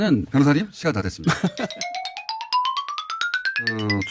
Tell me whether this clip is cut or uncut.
cut